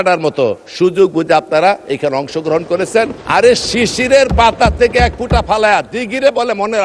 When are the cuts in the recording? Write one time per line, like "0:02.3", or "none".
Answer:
0:01.9
0:03.1